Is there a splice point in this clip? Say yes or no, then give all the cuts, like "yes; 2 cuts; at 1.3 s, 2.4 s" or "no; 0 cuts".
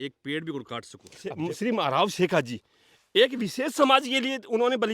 yes; 1 cut; at 1.4 s